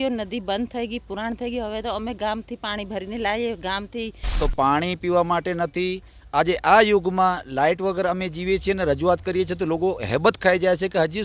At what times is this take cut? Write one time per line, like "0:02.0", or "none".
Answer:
0:04.4